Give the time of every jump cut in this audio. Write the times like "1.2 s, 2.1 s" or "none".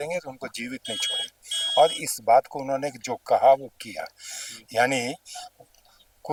none